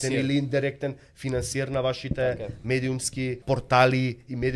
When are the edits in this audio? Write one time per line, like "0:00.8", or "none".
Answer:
0:03.4